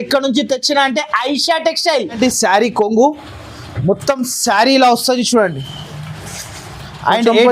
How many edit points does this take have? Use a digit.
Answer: 1